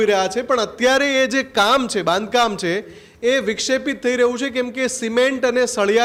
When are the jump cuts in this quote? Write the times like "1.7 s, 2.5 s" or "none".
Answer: none